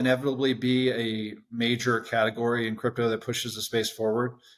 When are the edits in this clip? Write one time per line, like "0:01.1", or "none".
none